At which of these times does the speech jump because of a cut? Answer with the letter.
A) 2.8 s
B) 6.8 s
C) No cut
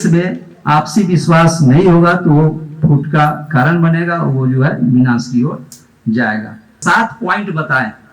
B